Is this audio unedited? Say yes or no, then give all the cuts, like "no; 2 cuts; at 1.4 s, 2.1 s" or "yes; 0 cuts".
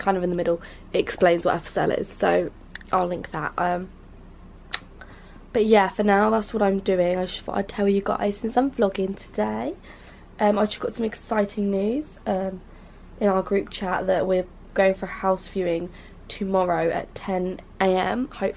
no; 1 cut; at 2.4 s